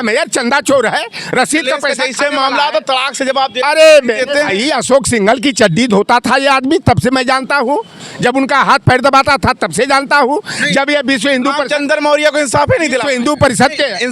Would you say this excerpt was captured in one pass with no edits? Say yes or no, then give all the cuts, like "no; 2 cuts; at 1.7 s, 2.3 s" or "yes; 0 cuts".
yes; 0 cuts